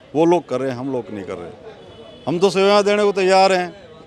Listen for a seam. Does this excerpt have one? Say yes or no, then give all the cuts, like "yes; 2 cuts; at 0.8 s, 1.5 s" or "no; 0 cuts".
no; 0 cuts